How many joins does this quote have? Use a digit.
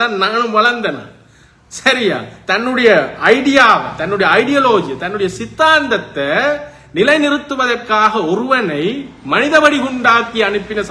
0